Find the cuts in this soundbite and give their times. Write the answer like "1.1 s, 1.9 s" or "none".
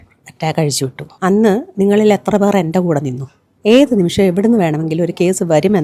1.0 s, 3.4 s